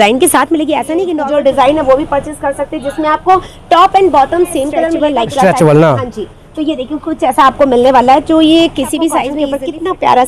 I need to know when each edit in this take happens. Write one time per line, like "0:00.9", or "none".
0:00.9
0:05.0
0:09.3